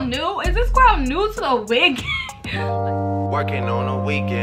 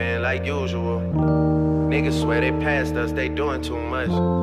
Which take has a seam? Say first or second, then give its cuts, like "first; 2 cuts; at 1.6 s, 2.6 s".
first; 1 cut; at 2.8 s